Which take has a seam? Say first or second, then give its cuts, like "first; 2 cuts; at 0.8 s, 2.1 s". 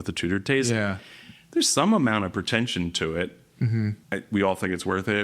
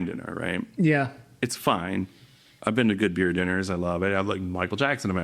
first; 1 cut; at 4.0 s